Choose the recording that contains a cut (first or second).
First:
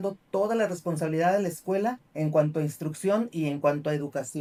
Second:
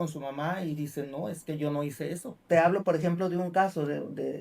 second